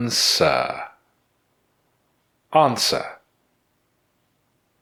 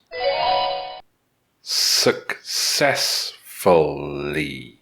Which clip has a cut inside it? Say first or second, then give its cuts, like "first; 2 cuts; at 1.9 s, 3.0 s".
second; 1 cut; at 1.0 s